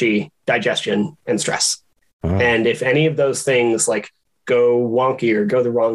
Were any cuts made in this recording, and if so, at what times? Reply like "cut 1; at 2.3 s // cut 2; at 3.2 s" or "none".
none

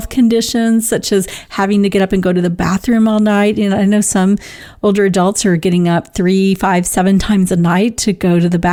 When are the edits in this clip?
none

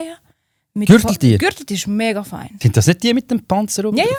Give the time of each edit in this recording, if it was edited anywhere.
none

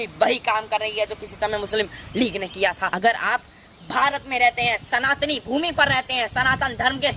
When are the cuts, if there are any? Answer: cut 1; at 2.9 s

